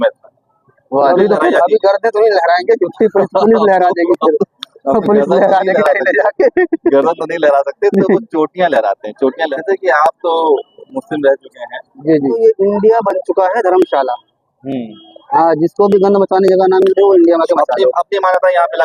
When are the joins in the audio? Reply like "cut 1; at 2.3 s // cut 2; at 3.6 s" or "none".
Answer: cut 1; at 1.1 s // cut 2; at 9.4 s // cut 3; at 12.4 s